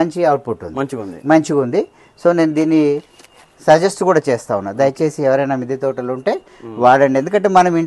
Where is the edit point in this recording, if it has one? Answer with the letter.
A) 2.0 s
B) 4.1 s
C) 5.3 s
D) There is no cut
D